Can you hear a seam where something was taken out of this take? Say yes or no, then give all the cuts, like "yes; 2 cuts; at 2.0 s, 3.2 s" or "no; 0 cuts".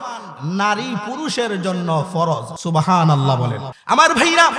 yes; 2 cuts; at 2.5 s, 3.7 s